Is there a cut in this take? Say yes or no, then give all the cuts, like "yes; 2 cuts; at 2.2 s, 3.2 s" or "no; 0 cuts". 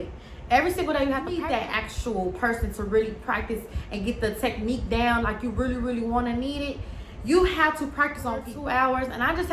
yes; 2 cuts; at 1.4 s, 8.5 s